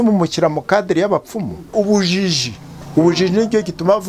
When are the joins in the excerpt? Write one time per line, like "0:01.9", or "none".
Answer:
0:01.7